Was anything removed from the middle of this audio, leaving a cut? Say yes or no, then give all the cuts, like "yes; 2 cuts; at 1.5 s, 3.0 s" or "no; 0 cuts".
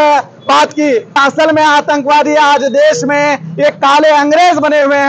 yes; 1 cut; at 1.2 s